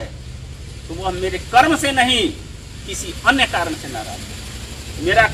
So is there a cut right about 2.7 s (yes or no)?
no